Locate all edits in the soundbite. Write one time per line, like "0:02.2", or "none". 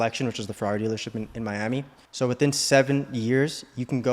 0:02.0